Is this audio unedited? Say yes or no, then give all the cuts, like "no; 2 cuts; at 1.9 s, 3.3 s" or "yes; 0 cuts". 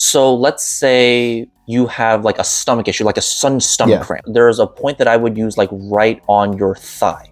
no; 3 cuts; at 1.5 s, 4.2 s, 6.2 s